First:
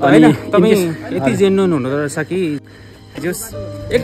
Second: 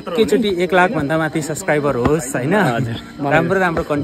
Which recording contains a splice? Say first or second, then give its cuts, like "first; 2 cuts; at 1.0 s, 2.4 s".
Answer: first; 1 cut; at 2.6 s